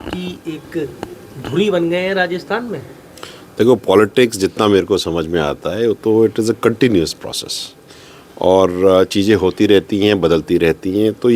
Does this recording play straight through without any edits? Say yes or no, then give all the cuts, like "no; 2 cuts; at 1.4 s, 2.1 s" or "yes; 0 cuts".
yes; 0 cuts